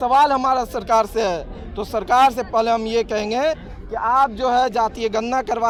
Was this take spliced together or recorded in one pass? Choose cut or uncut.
uncut